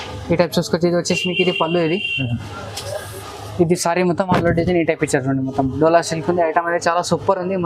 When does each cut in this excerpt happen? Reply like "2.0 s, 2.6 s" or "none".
none